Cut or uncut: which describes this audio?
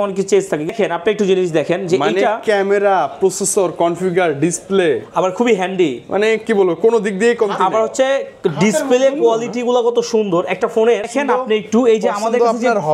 cut